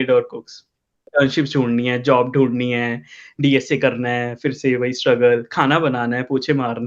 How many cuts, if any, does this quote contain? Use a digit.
1